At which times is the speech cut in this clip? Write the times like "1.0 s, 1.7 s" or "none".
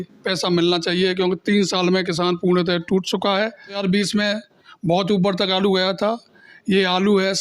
3.8 s